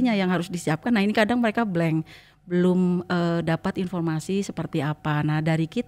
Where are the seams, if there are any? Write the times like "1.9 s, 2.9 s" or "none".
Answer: none